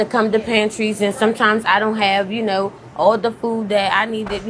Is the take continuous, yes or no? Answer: yes